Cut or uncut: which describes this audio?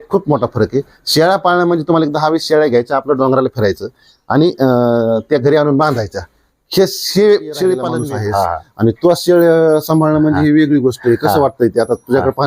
cut